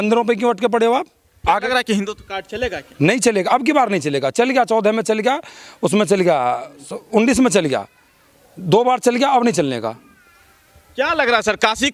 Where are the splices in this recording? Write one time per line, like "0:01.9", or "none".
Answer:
none